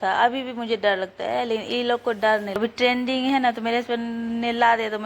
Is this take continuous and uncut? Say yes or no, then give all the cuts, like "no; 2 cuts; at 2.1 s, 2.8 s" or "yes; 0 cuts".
no; 1 cut; at 2.6 s